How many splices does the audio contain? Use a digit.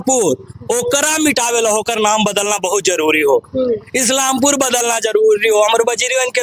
0